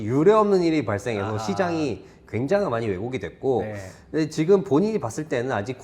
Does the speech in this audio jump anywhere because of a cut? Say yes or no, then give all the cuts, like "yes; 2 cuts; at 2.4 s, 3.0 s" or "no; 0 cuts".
no; 0 cuts